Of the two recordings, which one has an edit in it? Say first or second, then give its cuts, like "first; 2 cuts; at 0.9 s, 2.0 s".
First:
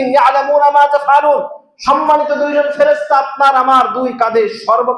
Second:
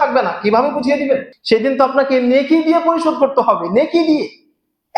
second; 1 cut; at 1.3 s